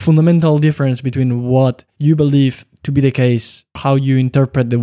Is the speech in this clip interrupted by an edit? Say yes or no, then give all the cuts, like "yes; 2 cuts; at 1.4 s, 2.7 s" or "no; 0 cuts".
yes; 2 cuts; at 1.9 s, 3.8 s